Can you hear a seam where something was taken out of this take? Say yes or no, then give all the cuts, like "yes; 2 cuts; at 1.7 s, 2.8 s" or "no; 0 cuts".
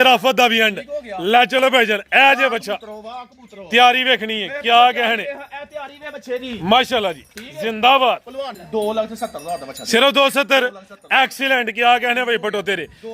yes; 1 cut; at 8.6 s